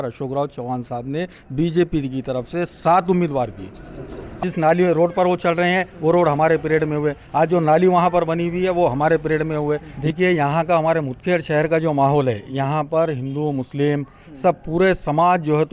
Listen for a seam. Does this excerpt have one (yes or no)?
yes